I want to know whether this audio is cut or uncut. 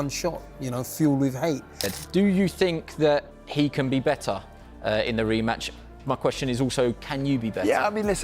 cut